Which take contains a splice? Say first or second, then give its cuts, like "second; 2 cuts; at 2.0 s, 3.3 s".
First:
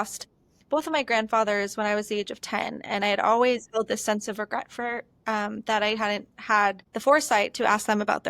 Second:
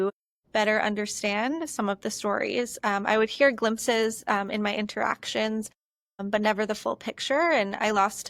first; 1 cut; at 6.9 s